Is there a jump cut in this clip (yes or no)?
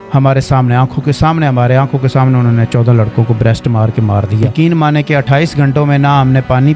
yes